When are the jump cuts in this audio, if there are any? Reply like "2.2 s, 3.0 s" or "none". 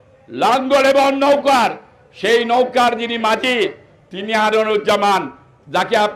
none